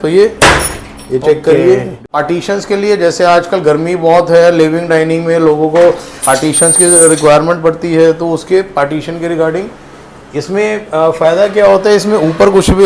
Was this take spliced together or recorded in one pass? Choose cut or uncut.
cut